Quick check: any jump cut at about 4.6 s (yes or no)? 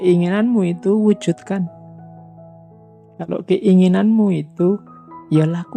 no